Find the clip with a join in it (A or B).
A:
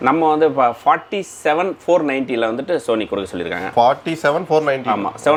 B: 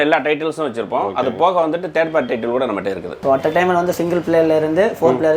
B